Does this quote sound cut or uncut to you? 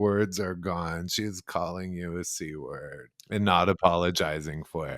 cut